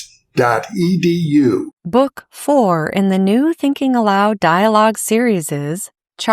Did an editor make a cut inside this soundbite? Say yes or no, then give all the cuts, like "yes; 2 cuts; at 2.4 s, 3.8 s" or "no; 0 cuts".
yes; 1 cut; at 1.8 s